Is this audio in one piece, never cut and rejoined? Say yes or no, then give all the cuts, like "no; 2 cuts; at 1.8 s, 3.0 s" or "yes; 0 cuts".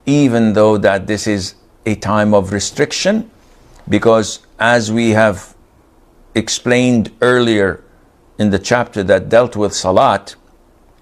yes; 0 cuts